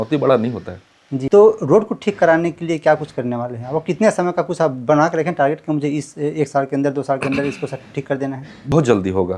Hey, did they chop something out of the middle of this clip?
yes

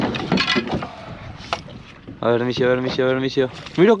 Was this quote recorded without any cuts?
yes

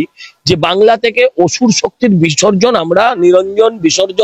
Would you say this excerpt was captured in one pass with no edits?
yes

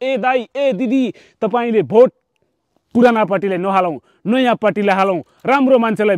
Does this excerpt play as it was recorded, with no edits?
yes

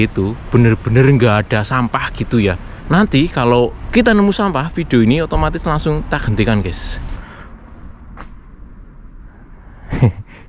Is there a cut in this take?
yes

